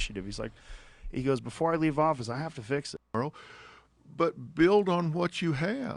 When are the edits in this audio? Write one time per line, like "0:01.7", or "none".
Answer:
0:03.1